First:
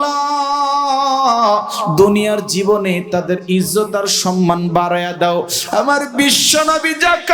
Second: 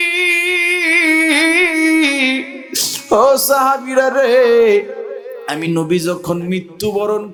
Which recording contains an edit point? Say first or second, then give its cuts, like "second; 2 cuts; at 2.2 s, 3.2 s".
first; 1 cut; at 5.6 s